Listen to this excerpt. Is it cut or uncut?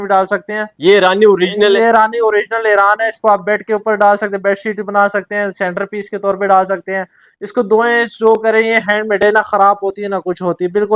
uncut